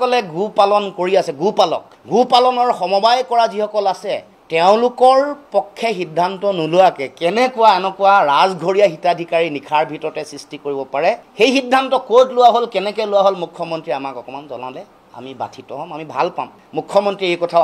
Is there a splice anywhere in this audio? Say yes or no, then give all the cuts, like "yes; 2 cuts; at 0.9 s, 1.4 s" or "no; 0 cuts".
no; 0 cuts